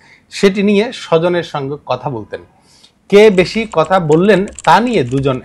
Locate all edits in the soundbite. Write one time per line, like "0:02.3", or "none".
none